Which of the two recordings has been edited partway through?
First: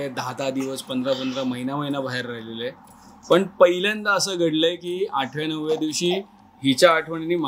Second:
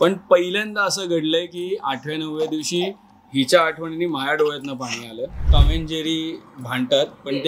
second; 1 cut; at 5.5 s

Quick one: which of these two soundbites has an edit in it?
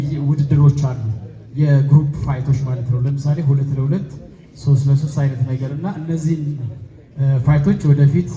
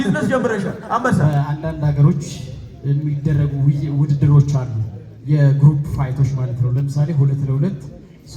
second; 1 cut; at 1.2 s

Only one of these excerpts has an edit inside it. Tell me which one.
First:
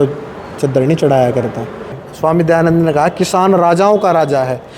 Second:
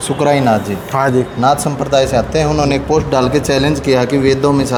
first; 1 cut; at 2.0 s

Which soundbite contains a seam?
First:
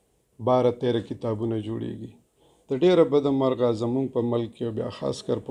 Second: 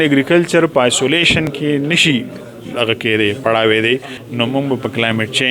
second; 1 cut; at 4.2 s

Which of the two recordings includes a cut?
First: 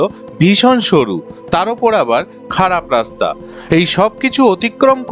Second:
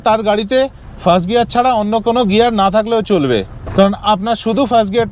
first; 1 cut; at 3.4 s

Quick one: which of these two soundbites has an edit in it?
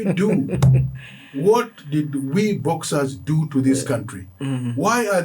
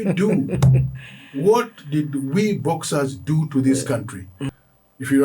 second; 1 cut; at 4.3 s

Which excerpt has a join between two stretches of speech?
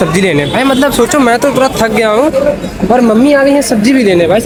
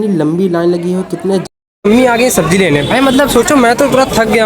second; 1 cut; at 1.4 s

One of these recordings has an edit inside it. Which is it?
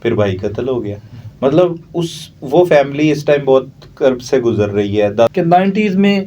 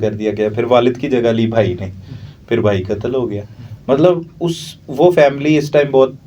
first; 1 cut; at 5.3 s

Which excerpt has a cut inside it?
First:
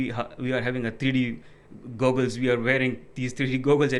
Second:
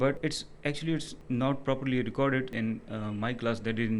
second; 2 cuts; at 1.1 s, 2.5 s

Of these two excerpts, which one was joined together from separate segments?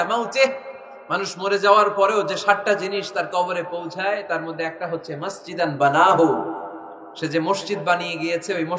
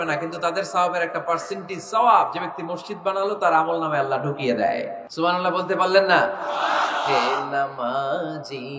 second; 1 cut; at 5.0 s

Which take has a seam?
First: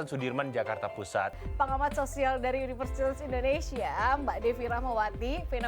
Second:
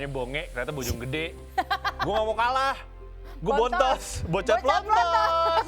first; 1 cut; at 1.3 s

